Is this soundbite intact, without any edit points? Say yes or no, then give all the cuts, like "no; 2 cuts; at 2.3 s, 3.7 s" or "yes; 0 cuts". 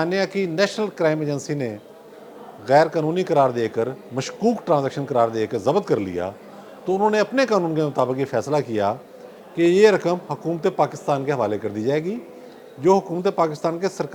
yes; 0 cuts